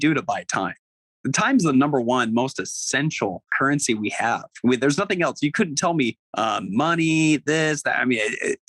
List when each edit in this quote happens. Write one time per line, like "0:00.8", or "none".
0:03.5
0:06.2